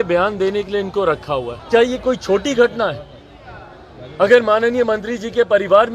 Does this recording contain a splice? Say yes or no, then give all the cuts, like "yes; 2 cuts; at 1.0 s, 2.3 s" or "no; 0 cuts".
yes; 1 cut; at 1.5 s